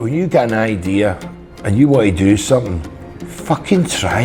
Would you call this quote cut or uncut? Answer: uncut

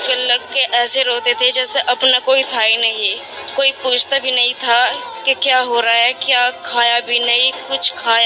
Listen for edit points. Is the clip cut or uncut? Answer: uncut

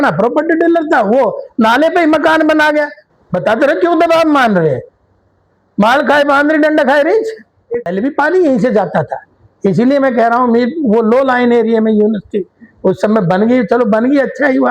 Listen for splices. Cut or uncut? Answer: cut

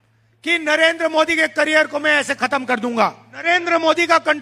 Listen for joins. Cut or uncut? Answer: cut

